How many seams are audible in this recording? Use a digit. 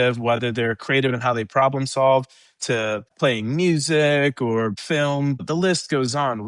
2